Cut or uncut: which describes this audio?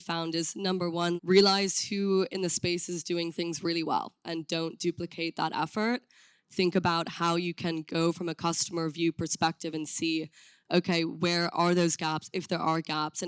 cut